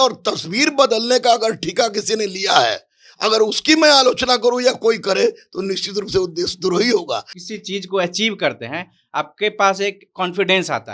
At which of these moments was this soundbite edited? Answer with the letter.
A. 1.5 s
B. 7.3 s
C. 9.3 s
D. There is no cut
B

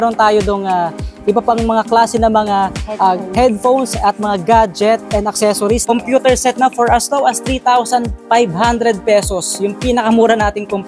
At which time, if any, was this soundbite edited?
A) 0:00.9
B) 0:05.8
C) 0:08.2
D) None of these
B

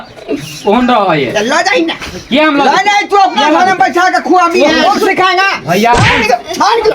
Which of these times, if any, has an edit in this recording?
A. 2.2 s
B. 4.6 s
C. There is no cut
B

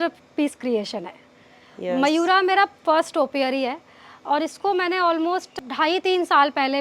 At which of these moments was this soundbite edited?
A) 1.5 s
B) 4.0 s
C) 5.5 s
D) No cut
C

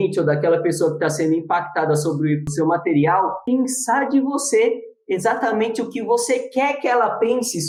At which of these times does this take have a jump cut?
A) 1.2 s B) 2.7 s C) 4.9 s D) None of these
D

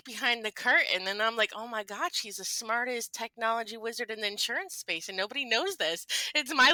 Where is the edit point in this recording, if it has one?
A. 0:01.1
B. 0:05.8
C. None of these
C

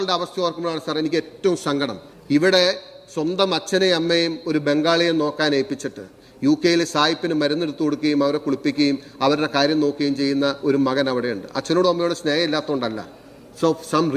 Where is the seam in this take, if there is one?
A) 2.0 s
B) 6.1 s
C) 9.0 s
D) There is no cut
A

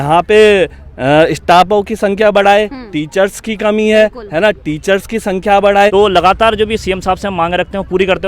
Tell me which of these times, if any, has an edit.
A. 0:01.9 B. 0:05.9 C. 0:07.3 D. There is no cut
B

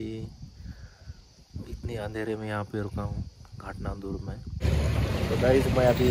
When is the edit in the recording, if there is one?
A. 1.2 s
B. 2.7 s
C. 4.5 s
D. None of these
C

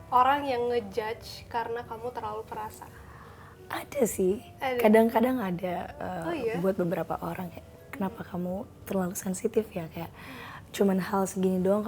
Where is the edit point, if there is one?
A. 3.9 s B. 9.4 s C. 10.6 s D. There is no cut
D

